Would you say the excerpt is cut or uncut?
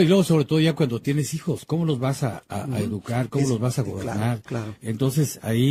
uncut